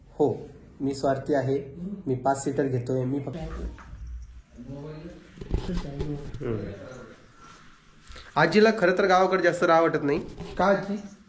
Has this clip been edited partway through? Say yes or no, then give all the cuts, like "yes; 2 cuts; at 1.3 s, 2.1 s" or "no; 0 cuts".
yes; 1 cut; at 3.3 s